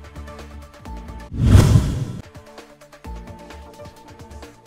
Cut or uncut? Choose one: cut